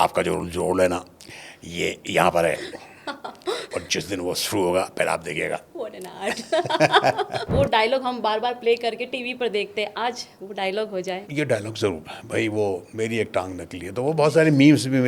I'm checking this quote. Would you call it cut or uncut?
cut